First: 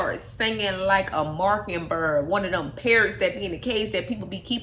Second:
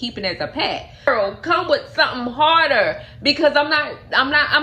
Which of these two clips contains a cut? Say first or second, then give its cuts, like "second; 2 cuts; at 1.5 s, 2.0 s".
second; 1 cut; at 1.1 s